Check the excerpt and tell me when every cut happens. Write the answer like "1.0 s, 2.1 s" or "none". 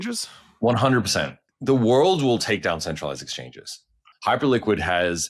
1.4 s, 4.1 s